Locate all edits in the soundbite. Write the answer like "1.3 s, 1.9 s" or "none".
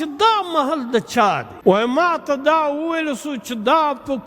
1.5 s